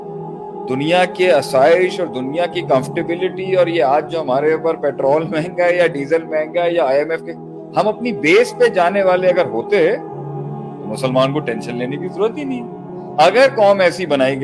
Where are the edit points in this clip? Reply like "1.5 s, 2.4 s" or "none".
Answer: none